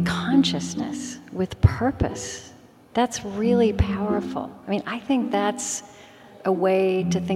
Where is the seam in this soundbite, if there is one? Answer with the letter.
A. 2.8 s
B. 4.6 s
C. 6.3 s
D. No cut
C